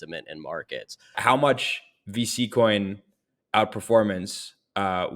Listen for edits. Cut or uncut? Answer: cut